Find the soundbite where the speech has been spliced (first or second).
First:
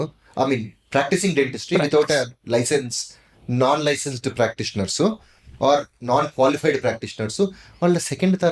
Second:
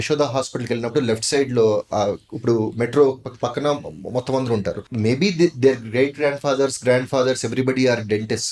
second